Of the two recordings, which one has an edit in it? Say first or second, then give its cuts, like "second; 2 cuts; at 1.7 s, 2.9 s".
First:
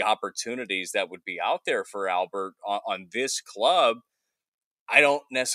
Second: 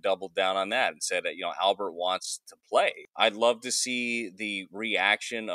second; 1 cut; at 3.0 s